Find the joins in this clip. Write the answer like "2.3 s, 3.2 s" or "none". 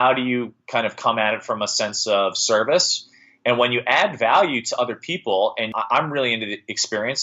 5.8 s